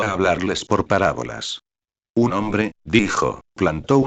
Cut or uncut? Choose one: uncut